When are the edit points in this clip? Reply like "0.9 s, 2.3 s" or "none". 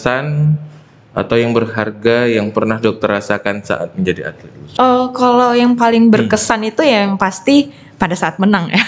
4.6 s